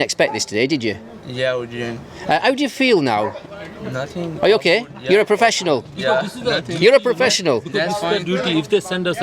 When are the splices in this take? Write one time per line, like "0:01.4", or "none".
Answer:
none